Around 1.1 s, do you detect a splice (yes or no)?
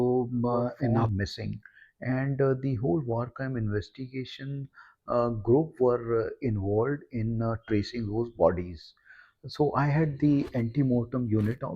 yes